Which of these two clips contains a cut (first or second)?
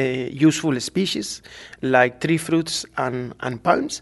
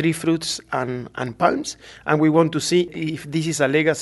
second